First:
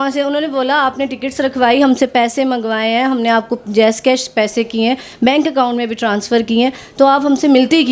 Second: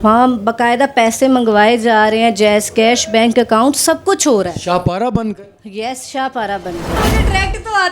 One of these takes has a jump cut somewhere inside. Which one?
second; 1 cut; at 7.0 s

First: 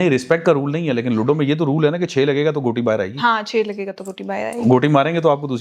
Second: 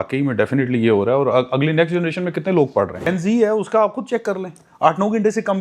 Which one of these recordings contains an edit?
second; 1 cut; at 3.0 s

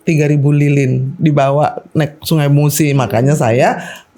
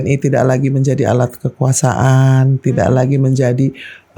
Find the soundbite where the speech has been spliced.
first; 1 cut; at 1.1 s

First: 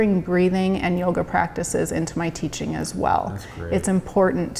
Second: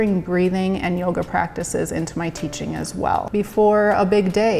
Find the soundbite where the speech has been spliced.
second; 1 cut; at 3.3 s

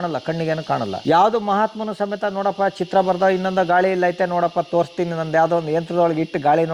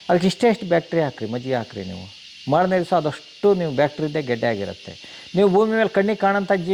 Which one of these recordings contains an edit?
first; 1 cut; at 1.0 s

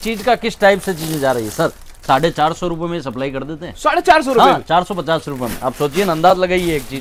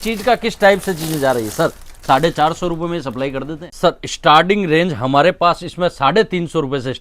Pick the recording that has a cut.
second; 1 cut; at 3.6 s

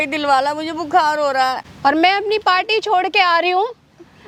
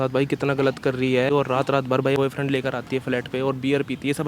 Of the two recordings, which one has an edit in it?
second; 1 cut; at 1.3 s

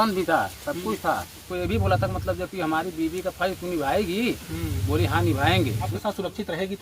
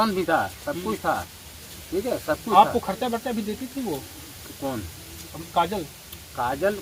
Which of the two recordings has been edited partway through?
first; 2 cuts; at 1.5 s, 5.9 s

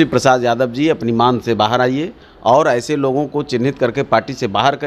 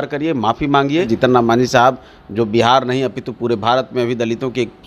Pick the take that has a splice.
second; 1 cut; at 1.1 s

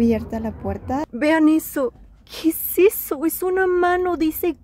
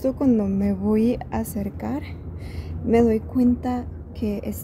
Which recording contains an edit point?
first; 1 cut; at 1.1 s

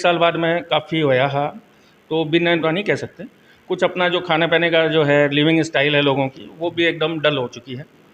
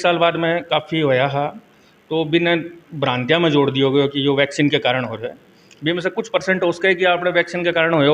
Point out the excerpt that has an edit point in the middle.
first; 1 cut; at 2.6 s

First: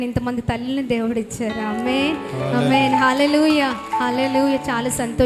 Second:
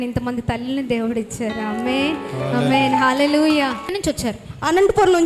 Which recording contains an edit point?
second; 1 cut; at 3.8 s

